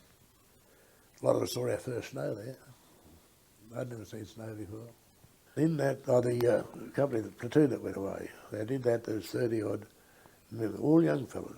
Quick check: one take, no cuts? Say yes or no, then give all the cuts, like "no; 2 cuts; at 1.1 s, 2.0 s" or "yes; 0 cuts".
no; 1 cut; at 5.5 s